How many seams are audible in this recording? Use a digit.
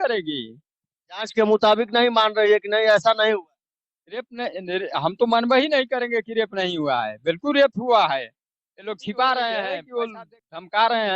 1